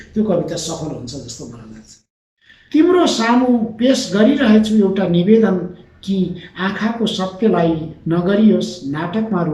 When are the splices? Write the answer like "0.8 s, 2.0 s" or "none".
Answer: 2.1 s